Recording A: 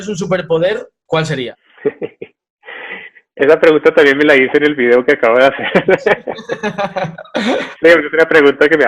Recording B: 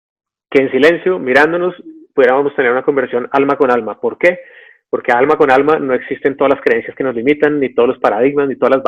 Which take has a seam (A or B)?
A